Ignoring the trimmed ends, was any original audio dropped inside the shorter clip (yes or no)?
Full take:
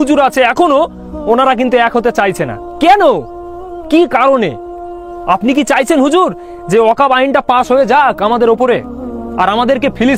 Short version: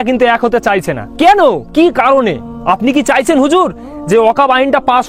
yes